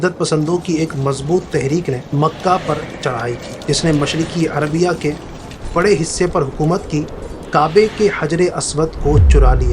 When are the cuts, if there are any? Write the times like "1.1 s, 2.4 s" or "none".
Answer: 2.0 s, 3.5 s